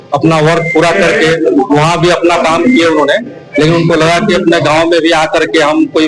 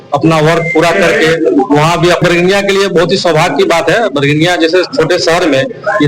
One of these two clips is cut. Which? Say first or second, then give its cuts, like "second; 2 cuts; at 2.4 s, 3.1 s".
second; 1 cut; at 2.2 s